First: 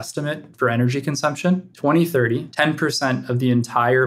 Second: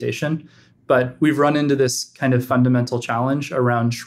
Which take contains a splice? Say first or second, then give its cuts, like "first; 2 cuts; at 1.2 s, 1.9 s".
first; 2 cuts; at 1.7 s, 2.5 s